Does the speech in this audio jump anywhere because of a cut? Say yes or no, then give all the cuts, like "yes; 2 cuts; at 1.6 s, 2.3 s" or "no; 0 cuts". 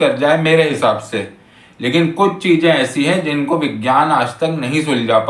no; 0 cuts